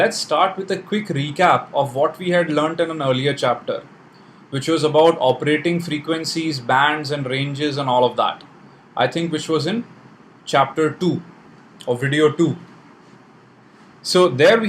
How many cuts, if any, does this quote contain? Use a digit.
1